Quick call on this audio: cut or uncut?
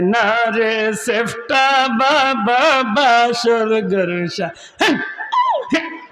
uncut